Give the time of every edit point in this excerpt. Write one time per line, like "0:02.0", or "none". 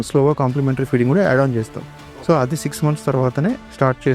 none